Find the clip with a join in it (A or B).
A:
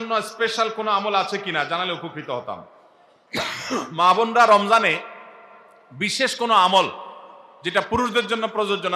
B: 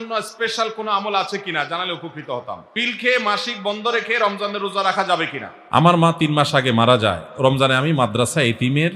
B